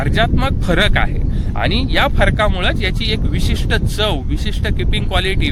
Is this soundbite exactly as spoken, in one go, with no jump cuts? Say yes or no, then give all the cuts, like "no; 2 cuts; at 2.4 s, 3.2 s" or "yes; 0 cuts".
yes; 0 cuts